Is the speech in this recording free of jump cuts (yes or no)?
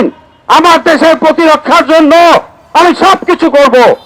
yes